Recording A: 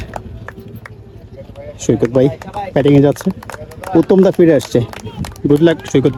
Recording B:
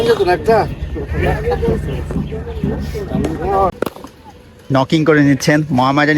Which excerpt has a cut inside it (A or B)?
B